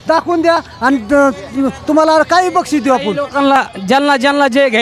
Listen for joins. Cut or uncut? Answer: uncut